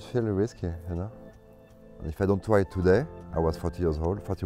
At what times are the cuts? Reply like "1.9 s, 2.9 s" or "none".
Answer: 1.4 s